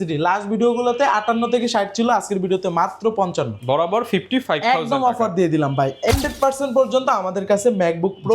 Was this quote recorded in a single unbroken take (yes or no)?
no